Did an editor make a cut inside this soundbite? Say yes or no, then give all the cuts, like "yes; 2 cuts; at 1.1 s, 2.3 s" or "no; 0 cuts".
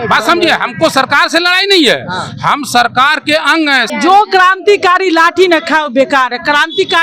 yes; 1 cut; at 3.9 s